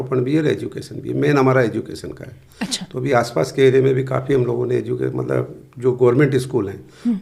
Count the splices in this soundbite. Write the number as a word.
zero